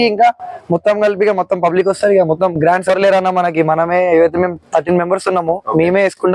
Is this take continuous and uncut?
no; 1 cut; at 2.9 s

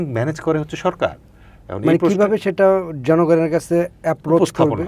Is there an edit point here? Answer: no; 0 cuts

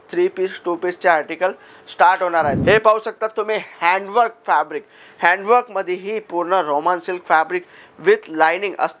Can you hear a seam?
yes; 1 cut; at 2.6 s

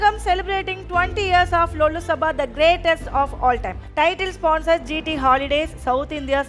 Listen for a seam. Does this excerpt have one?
no; 0 cuts

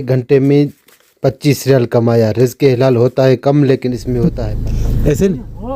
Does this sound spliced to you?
yes; 1 cut; at 4.2 s

